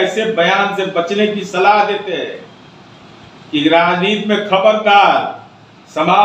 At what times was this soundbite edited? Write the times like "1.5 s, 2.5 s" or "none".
none